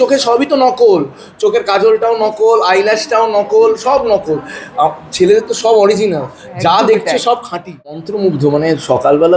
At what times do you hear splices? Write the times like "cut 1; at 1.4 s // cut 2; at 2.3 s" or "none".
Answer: cut 1; at 7.9 s